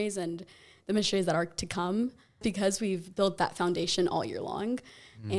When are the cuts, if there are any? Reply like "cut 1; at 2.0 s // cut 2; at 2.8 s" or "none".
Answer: cut 1; at 2.4 s